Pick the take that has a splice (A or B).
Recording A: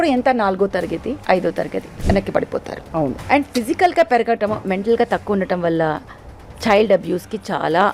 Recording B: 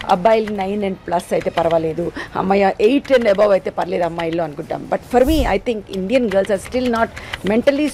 A